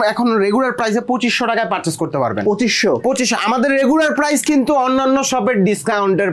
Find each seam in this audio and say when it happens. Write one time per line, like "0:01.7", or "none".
none